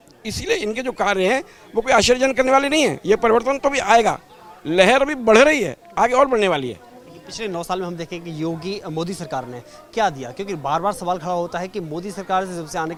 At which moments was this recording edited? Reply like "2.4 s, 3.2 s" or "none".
none